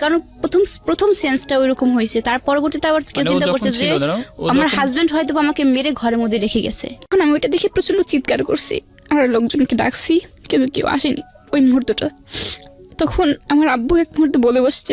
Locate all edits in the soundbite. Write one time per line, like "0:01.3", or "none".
0:07.1

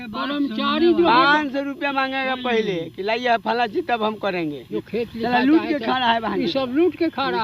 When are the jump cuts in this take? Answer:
0:04.6

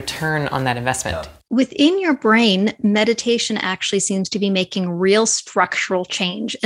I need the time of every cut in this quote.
0:01.3

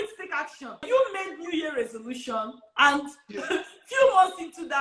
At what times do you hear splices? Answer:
0:00.9
0:02.6

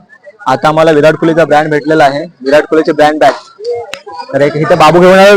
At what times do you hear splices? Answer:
none

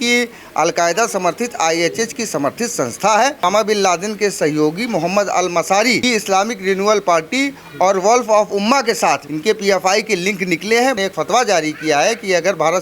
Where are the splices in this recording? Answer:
0:03.4
0:06.0
0:09.3
0:11.0

